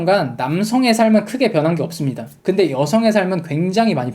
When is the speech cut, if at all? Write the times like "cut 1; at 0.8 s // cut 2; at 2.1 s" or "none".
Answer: cut 1; at 2.3 s

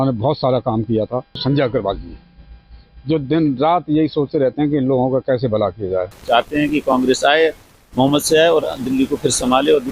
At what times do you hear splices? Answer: cut 1; at 1.4 s // cut 2; at 6.1 s

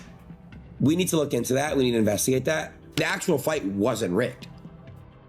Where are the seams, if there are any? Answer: cut 1; at 2.9 s

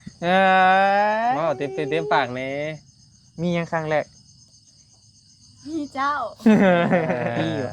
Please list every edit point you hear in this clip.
none

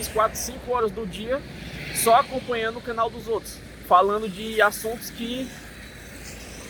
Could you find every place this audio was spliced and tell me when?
none

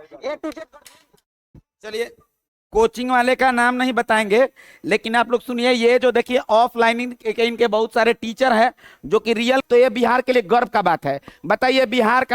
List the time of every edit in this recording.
cut 1; at 9.6 s

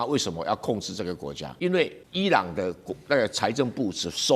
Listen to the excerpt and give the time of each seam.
cut 1; at 1.4 s // cut 2; at 2.0 s

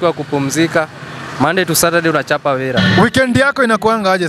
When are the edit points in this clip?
cut 1; at 2.8 s

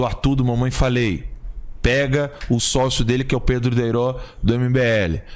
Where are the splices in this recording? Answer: none

